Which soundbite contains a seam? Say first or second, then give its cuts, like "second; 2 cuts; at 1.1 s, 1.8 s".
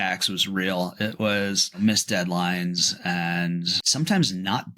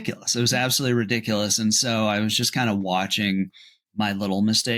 first; 2 cuts; at 1.6 s, 3.8 s